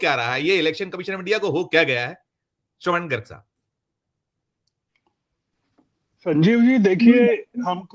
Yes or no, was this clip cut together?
no